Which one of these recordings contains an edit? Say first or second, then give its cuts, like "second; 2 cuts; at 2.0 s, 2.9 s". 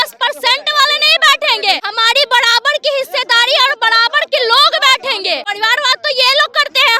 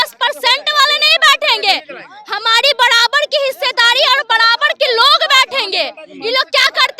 first; 2 cuts; at 1.9 s, 5.5 s